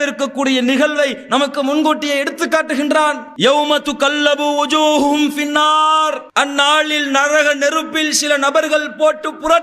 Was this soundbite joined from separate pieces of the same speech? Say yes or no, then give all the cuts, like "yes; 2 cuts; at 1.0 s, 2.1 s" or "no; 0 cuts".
yes; 1 cut; at 6.2 s